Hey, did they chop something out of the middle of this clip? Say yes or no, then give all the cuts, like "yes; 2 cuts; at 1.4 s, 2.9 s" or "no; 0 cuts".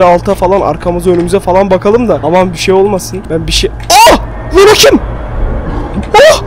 yes; 2 cuts; at 2.2 s, 3.1 s